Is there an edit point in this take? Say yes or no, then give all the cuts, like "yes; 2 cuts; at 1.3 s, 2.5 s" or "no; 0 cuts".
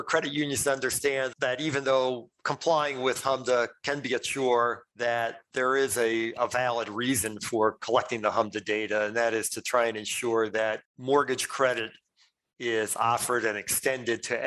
yes; 1 cut; at 1.3 s